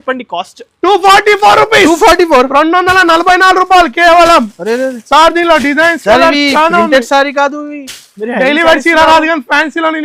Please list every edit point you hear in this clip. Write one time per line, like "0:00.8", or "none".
none